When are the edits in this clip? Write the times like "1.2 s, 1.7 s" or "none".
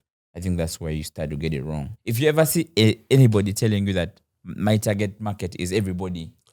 1.9 s